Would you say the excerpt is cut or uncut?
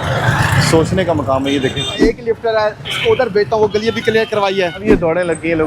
cut